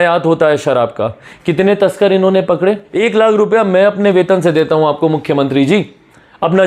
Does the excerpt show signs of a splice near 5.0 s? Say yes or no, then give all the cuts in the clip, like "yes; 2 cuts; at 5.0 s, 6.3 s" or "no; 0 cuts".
no; 1 cut; at 2.9 s